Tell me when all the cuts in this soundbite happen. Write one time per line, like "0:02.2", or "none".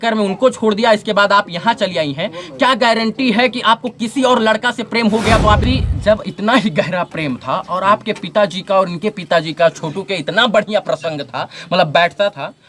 0:05.6

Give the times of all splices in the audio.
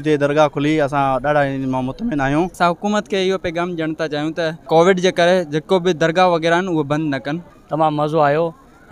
0:02.5
0:04.6
0:07.4

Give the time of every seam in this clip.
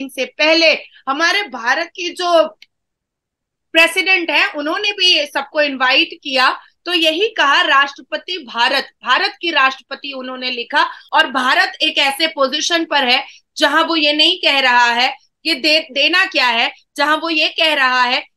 0:11.0

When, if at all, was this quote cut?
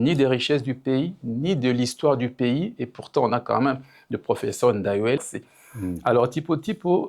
0:05.2

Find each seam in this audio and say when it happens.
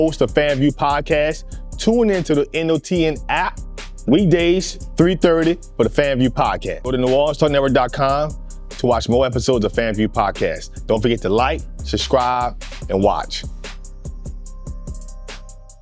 none

